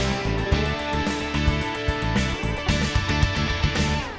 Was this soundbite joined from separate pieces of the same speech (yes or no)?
yes